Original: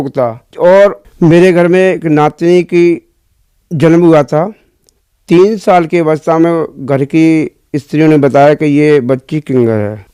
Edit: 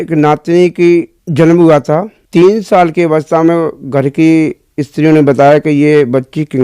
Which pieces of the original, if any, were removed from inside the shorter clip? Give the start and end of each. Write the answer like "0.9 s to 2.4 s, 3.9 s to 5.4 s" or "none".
3.1 s to 3.6 s, 4.6 s to 5.1 s

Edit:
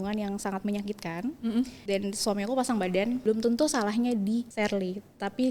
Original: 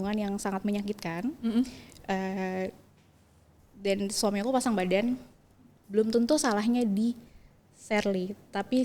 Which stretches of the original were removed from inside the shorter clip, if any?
1.8 s to 3.7 s, 5.2 s to 5.9 s, 7.2 s to 7.8 s

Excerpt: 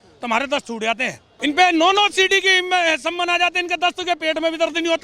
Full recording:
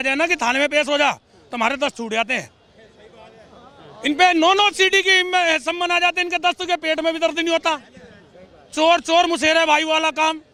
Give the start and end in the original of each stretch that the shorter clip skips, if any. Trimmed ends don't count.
2.6 s to 3.9 s

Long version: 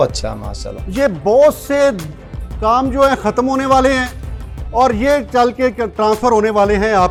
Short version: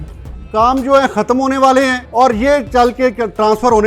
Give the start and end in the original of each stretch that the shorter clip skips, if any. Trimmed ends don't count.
4.1 s to 4.6 s

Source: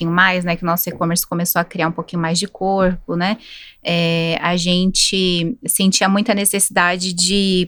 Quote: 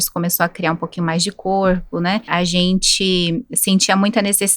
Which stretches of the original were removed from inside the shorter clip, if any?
3.4 s to 4.4 s

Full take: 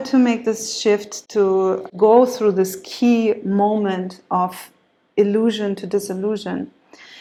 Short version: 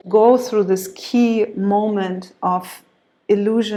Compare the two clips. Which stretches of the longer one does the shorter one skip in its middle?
none

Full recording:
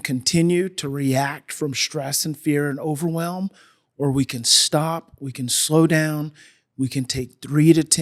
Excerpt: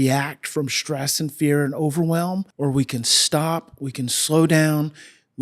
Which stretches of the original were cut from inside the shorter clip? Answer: 3.5 s to 3.9 s

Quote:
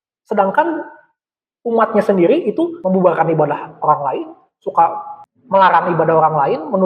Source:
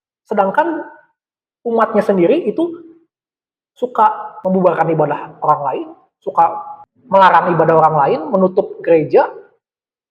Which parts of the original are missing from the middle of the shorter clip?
2.8 s to 4.4 s

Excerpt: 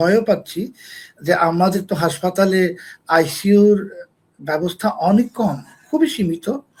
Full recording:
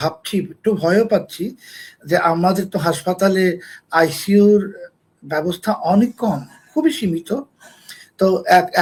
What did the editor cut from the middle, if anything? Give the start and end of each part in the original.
none

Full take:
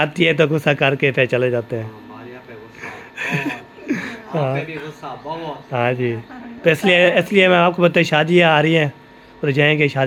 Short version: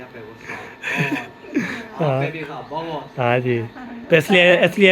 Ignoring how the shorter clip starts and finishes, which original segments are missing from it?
4.9 s to 5.1 s

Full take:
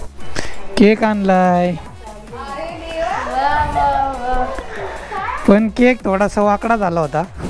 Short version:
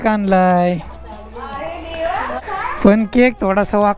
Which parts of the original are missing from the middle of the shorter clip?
3.3 s to 5.0 s

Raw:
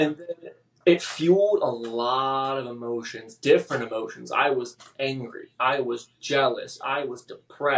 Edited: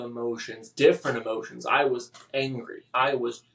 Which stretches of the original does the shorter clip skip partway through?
none

